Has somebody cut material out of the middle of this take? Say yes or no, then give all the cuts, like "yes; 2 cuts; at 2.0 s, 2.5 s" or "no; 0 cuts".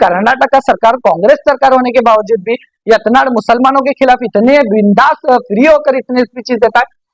no; 0 cuts